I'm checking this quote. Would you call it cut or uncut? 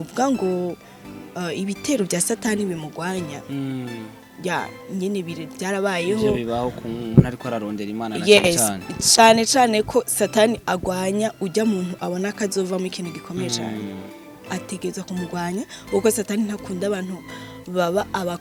uncut